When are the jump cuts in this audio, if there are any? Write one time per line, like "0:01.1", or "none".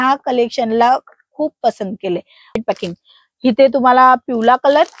0:02.6